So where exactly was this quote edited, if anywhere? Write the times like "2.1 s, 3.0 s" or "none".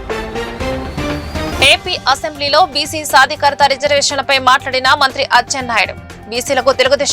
1.5 s